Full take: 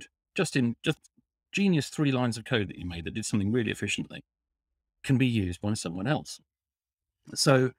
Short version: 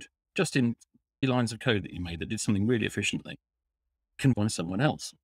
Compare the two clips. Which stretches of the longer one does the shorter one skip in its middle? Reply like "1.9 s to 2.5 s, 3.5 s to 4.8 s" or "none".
1.2 s to 2.1 s, 5.2 s to 5.6 s